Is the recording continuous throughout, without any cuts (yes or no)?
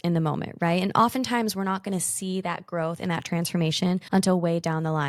yes